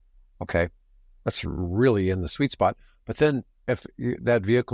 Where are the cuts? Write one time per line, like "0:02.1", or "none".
none